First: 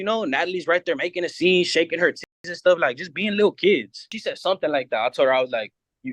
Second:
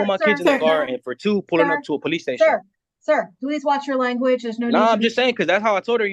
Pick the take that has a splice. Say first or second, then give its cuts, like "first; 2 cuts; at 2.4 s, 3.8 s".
first; 1 cut; at 4.1 s